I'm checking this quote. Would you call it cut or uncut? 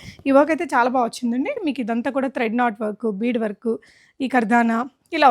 cut